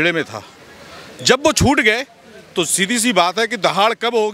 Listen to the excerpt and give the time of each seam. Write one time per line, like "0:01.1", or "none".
none